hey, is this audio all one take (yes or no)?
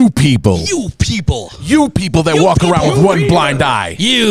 yes